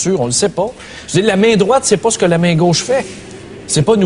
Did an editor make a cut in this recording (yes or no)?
no